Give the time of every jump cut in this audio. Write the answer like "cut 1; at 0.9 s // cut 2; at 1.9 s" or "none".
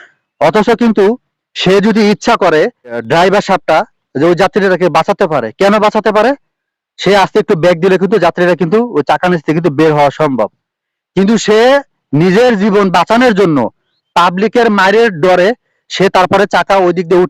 cut 1; at 3.0 s